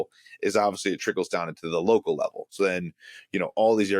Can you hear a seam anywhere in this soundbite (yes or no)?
no